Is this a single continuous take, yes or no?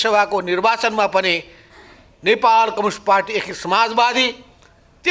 yes